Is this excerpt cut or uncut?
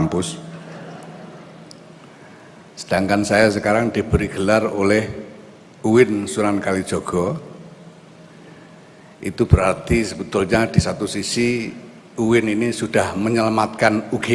uncut